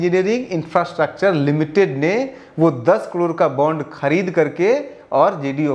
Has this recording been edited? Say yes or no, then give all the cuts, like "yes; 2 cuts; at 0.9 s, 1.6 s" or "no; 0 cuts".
no; 0 cuts